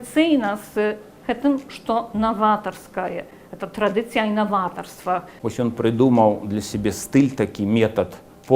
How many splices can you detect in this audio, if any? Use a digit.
1